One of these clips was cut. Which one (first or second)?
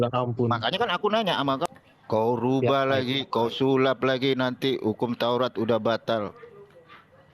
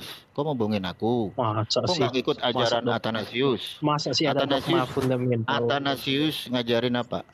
first